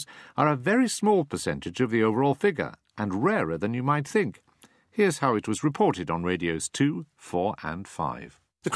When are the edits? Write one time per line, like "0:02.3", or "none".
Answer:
0:05.5